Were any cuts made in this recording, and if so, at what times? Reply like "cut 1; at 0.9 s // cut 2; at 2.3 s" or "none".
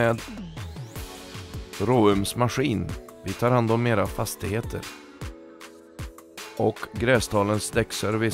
cut 1; at 6.6 s